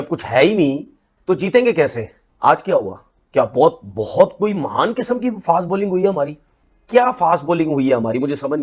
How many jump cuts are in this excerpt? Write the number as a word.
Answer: zero